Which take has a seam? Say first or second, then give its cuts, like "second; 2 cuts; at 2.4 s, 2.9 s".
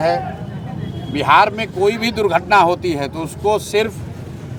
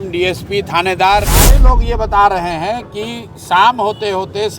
second; 1 cut; at 1.6 s